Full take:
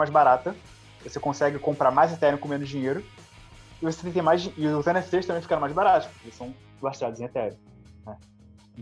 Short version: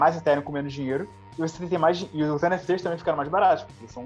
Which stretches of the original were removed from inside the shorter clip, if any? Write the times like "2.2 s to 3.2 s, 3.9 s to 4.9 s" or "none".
3.2 s to 3.6 s